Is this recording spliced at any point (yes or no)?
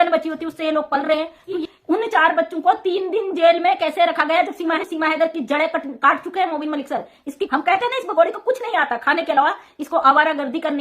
yes